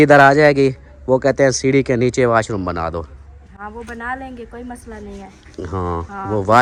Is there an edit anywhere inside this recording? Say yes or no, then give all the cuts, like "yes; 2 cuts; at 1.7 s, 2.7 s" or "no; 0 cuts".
no; 0 cuts